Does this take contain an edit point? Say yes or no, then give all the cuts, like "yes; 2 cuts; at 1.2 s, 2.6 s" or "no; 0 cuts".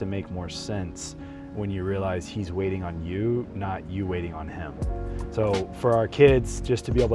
no; 0 cuts